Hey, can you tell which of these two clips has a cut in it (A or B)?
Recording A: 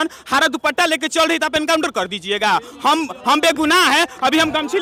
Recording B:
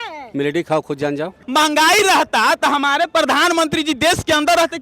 B